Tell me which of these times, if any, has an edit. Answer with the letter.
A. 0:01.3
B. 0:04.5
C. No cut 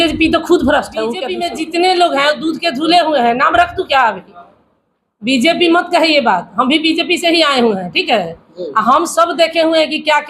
A